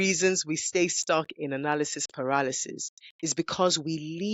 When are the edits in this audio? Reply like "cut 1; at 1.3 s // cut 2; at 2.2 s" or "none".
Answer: none